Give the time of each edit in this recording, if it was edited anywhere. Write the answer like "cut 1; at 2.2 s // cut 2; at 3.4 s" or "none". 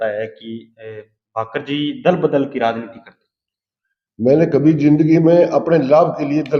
none